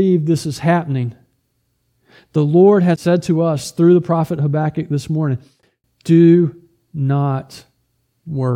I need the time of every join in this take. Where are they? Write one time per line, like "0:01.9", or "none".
0:03.0